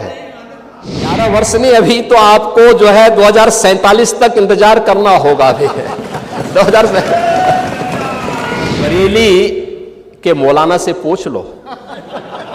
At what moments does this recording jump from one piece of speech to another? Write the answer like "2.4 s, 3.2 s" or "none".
1.1 s, 8.8 s